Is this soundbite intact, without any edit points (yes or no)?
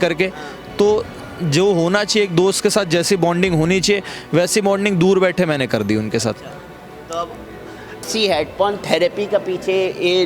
no